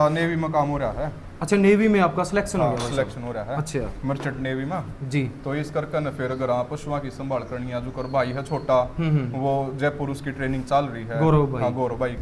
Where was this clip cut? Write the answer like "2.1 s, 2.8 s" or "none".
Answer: none